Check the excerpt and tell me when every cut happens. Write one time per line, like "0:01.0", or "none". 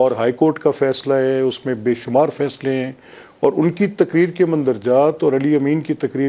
none